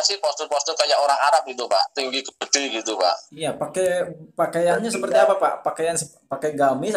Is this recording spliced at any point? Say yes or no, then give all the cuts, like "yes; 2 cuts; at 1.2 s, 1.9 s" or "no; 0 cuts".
no; 0 cuts